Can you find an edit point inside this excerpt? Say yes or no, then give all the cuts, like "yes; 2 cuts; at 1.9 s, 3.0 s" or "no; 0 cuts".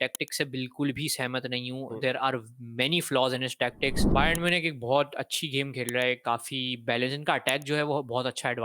yes; 1 cut; at 4.0 s